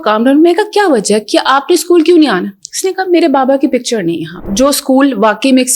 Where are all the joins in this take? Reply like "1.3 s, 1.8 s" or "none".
4.4 s